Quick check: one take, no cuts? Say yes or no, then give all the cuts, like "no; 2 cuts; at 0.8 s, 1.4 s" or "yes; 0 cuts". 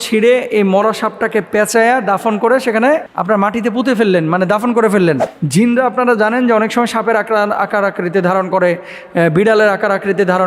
no; 1 cut; at 5.3 s